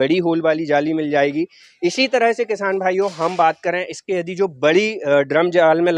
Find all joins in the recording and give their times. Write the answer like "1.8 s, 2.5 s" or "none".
none

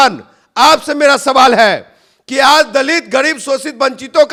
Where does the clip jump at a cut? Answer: none

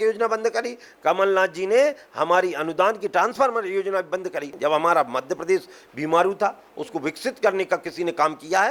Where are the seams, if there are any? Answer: 4.5 s

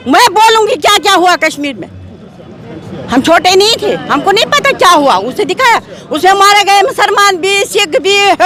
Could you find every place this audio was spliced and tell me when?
none

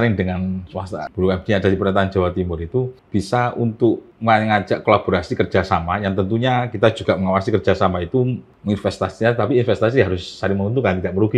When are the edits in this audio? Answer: 1.1 s, 3.0 s, 4.1 s, 8.5 s

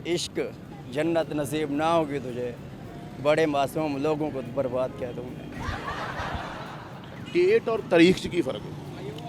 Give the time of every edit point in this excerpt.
none

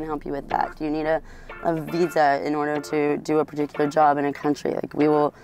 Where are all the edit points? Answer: none

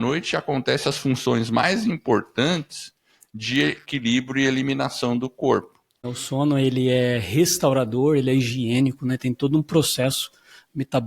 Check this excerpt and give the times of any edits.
6.1 s

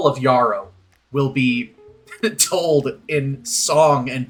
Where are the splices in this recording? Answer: none

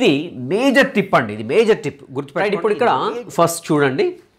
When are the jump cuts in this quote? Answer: 2.5 s

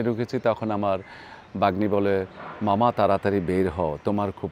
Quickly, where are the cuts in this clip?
none

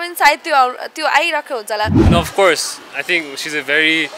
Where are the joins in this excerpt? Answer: 2.1 s

